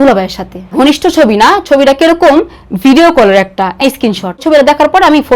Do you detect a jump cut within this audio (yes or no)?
yes